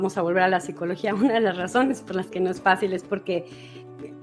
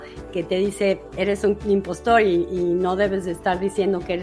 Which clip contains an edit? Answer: second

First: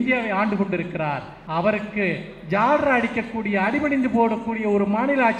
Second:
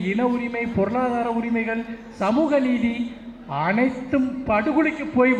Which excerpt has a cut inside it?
first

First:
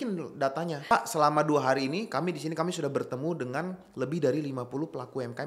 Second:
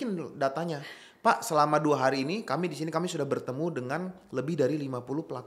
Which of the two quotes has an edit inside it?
first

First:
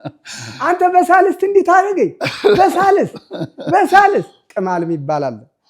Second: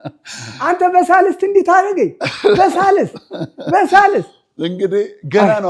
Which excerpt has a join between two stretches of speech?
first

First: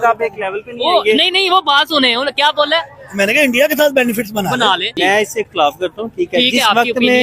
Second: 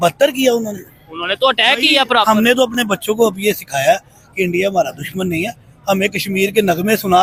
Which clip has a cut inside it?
first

